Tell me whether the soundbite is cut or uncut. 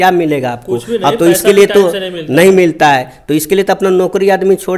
uncut